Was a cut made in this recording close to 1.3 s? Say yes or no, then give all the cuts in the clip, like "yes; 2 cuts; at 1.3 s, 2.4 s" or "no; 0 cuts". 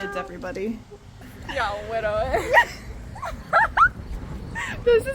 yes; 1 cut; at 1.3 s